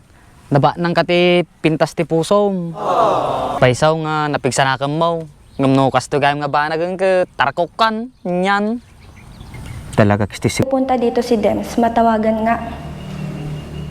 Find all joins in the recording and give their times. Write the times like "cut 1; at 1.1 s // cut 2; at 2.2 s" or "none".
cut 1; at 3.5 s // cut 2; at 10.7 s